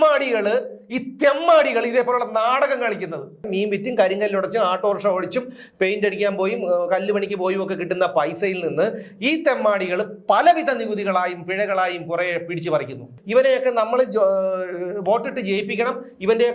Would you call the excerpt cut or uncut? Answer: cut